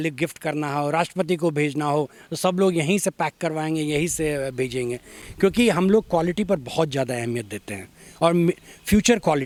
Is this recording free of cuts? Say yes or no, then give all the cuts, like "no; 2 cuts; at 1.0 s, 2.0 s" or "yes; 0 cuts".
yes; 0 cuts